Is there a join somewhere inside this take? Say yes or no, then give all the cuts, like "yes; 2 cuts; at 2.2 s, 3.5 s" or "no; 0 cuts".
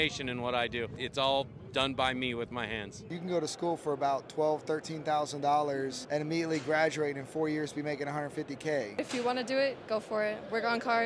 yes; 4 cuts; at 1.0 s, 3.0 s, 6.0 s, 8.9 s